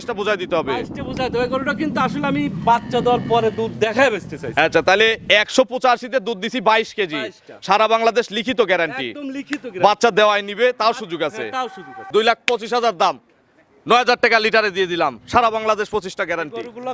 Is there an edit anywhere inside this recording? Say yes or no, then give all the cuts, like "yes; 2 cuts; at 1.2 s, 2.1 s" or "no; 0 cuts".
yes; 1 cut; at 12.0 s